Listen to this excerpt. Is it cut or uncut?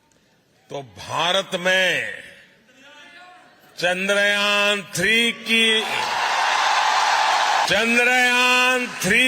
cut